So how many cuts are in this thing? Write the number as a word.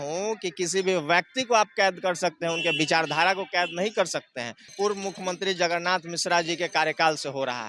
one